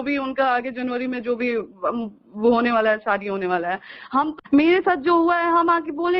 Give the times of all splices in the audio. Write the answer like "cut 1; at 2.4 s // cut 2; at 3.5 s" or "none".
cut 1; at 4.4 s